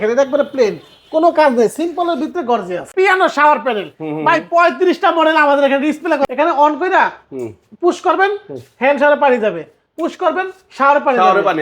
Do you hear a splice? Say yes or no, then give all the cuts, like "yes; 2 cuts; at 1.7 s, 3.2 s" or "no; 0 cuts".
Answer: yes; 2 cuts; at 2.9 s, 6.2 s